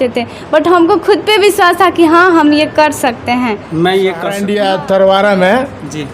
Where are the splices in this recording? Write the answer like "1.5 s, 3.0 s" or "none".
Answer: 4.4 s